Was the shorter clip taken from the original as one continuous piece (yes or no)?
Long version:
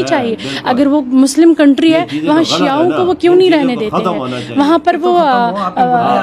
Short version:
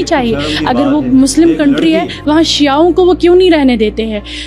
yes